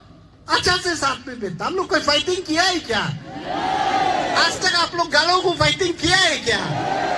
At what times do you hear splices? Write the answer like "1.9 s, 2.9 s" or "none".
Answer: none